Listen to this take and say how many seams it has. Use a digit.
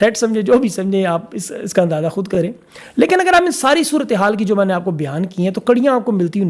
0